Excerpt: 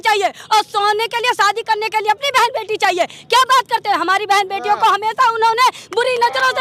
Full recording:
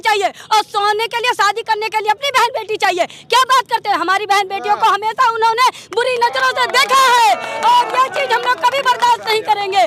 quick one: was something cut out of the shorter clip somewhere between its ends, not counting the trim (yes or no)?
no